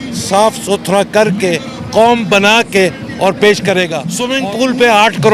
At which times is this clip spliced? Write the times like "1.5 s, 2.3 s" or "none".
4.2 s

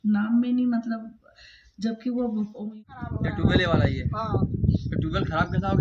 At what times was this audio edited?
2.5 s

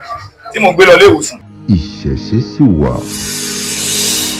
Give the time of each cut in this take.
1.5 s

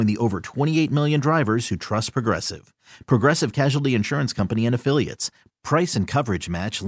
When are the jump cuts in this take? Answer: none

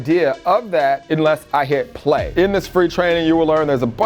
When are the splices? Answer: 2.3 s

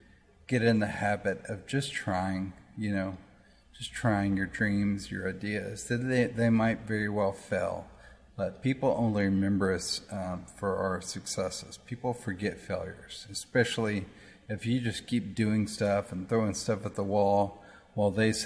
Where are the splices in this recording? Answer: none

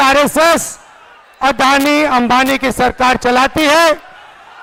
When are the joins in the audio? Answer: none

